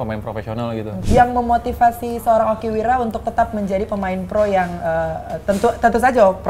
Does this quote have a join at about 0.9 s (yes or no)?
yes